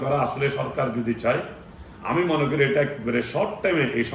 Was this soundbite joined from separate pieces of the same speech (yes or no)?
no